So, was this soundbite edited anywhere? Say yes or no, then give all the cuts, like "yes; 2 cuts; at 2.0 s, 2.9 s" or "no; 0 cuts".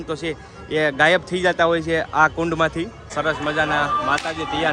yes; 1 cut; at 3.0 s